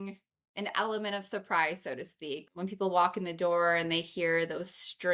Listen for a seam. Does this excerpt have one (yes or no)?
yes